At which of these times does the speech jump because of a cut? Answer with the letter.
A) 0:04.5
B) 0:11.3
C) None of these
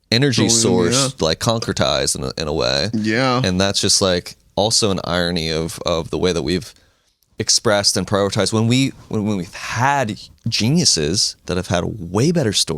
B